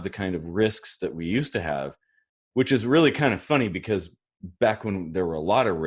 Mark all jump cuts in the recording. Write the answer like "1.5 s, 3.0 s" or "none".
none